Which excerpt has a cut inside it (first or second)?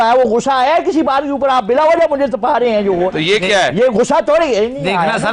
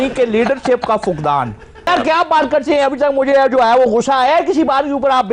second